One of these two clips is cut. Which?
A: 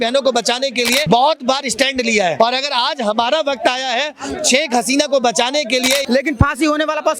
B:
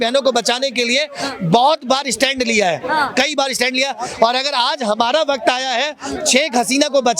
A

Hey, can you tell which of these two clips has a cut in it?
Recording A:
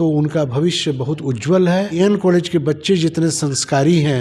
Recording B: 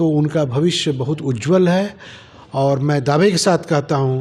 A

